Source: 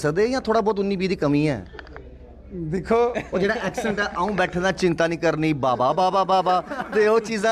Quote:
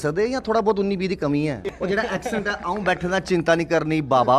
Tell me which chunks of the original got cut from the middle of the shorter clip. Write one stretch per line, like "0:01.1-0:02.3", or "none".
0:01.7-0:03.2